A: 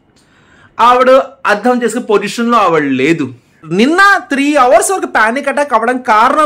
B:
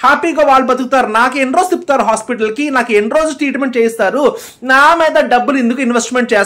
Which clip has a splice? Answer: A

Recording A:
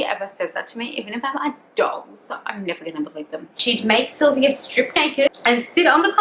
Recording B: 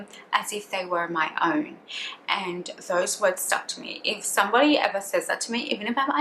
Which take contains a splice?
A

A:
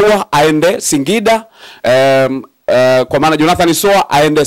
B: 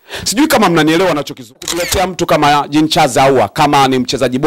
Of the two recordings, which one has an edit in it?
B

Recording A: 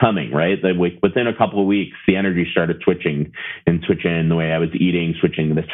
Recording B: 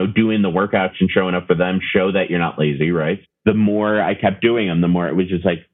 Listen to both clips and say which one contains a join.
B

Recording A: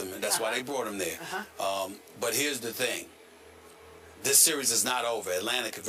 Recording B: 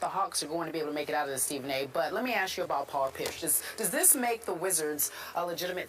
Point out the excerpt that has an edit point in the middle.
B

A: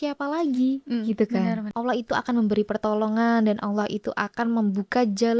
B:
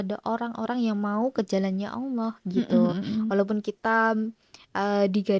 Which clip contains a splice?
A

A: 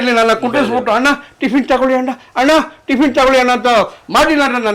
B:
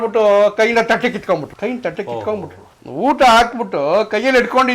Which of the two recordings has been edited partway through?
B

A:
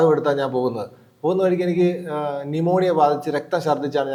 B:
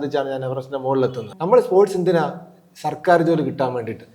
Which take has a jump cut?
B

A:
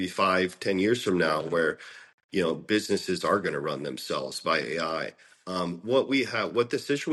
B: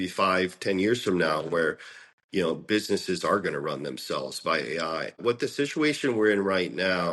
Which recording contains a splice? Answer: B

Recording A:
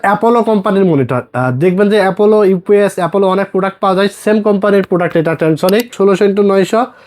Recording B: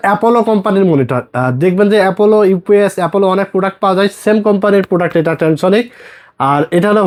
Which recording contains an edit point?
A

